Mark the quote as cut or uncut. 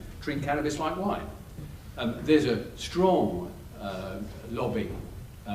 cut